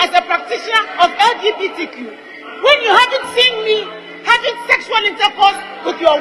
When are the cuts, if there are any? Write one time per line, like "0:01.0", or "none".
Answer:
none